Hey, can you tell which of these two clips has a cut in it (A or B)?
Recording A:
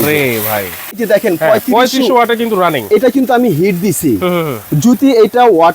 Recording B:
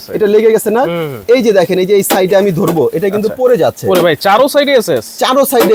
A